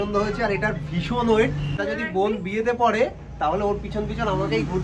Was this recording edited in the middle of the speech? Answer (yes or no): yes